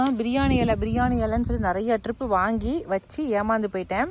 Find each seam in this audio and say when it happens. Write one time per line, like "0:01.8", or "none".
none